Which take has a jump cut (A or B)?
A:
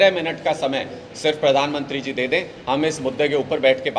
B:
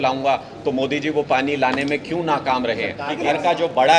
B